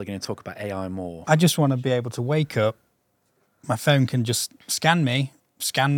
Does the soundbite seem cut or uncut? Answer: cut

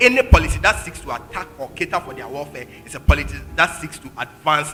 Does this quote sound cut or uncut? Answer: uncut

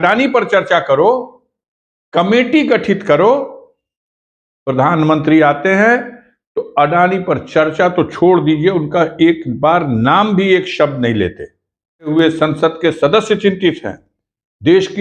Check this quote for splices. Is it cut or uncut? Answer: cut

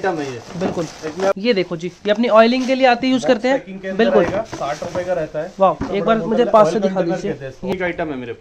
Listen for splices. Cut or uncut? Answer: cut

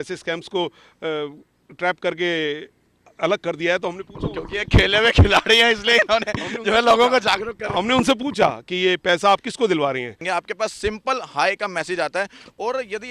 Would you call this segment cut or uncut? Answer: cut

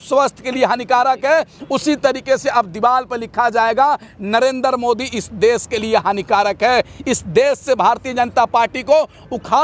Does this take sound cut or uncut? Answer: uncut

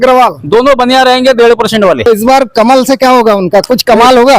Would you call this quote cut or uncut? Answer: cut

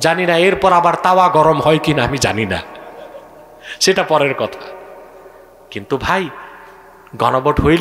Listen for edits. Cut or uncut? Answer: uncut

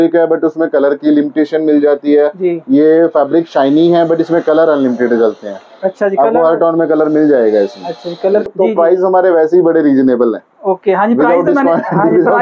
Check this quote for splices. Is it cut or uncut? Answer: cut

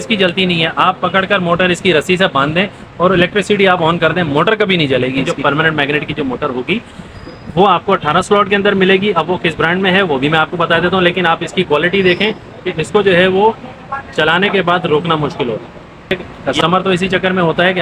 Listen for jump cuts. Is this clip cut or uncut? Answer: cut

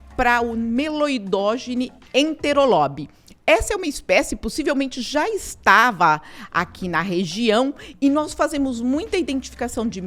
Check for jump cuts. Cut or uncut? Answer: cut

